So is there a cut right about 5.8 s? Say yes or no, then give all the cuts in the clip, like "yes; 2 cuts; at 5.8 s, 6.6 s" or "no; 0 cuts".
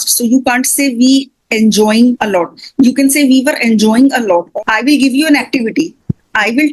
no; 2 cuts; at 2.2 s, 4.5 s